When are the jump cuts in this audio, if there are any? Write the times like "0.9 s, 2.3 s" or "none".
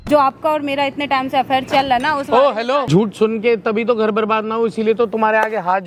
2.9 s

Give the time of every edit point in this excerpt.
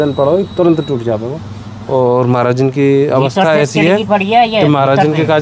none

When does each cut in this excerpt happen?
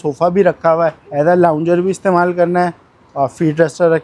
1.0 s

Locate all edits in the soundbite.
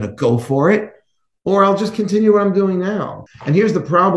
3.2 s

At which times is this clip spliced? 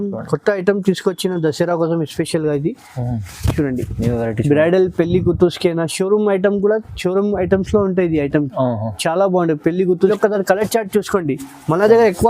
10.1 s

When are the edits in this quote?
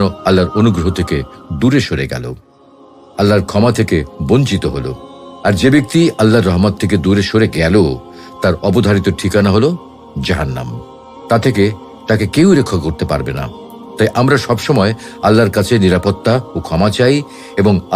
none

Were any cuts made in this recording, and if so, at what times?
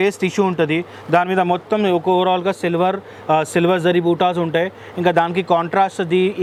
none

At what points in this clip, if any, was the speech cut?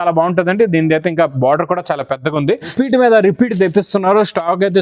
2.7 s

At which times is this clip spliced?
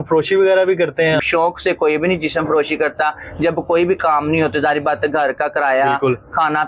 1.2 s

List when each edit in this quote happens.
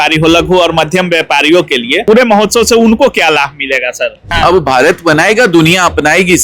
2.0 s, 4.3 s

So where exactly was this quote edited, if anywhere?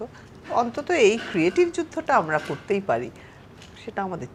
none

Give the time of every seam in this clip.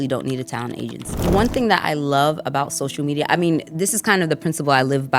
1.3 s

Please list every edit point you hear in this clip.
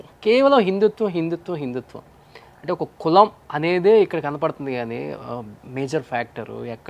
3.4 s

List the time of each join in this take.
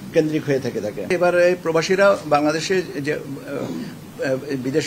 1.1 s

